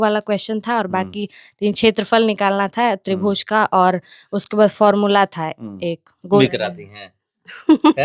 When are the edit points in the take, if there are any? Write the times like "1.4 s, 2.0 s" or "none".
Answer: 6.4 s